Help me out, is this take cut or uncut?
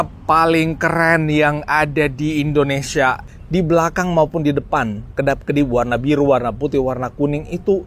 cut